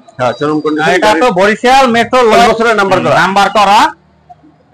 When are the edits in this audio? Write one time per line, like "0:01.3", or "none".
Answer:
0:02.5